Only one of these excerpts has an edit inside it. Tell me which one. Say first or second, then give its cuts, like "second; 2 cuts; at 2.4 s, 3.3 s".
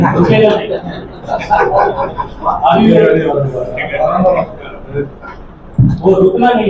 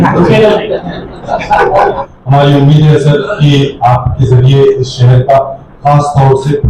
second; 1 cut; at 2.1 s